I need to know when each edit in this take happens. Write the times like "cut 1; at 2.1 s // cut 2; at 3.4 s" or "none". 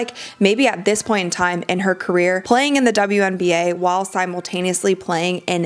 cut 1; at 2.4 s